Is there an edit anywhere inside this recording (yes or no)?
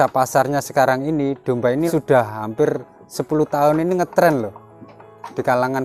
yes